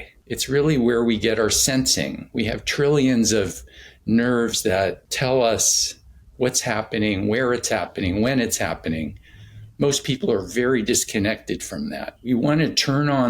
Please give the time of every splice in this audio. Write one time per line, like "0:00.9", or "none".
0:12.1